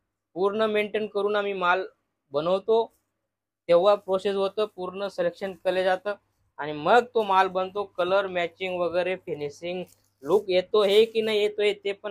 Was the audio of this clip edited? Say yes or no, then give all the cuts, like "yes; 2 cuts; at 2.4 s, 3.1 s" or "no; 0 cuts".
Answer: no; 0 cuts